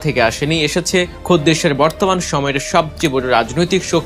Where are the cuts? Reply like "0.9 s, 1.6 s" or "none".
1.1 s